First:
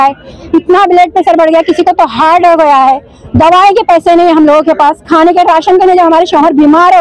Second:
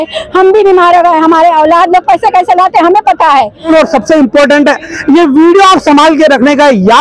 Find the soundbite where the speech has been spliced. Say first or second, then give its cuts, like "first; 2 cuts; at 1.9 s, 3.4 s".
second; 1 cut; at 3.7 s